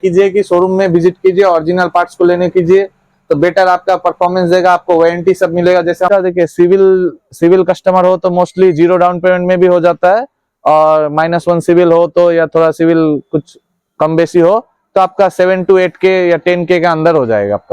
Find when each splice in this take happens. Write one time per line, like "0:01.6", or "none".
0:06.1